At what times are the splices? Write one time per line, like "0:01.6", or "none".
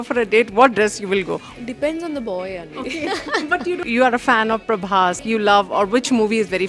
0:01.4
0:03.8
0:05.2

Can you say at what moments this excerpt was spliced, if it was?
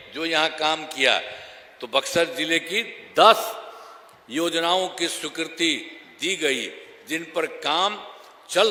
none

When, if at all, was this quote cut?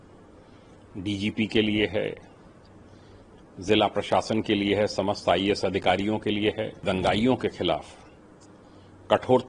0:06.8

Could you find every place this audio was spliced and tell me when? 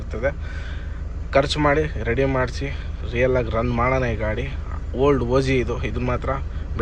none

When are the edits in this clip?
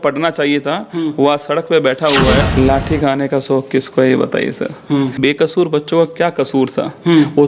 0:02.4
0:05.2

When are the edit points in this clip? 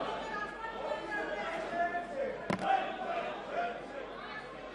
none

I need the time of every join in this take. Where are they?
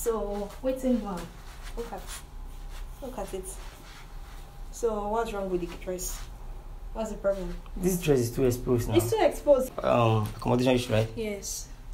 0:09.7

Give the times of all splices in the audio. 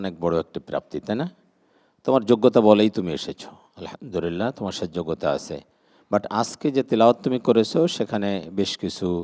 none

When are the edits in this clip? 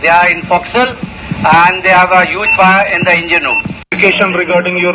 0:03.8

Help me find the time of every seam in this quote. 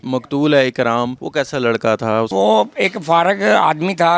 0:01.2
0:02.3

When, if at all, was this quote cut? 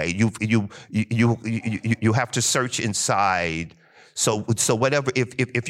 none

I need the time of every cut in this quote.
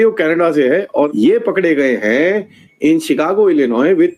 0:01.1

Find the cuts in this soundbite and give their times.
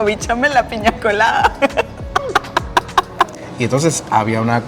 0:03.3

